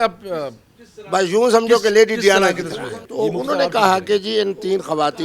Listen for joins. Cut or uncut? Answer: cut